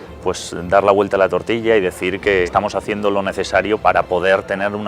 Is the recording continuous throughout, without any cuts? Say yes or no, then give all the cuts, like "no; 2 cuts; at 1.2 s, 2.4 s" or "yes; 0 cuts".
no; 2 cuts; at 2.5 s, 3.8 s